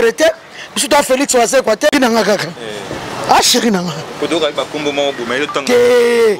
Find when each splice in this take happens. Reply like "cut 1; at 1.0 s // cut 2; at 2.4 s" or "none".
cut 1; at 1.9 s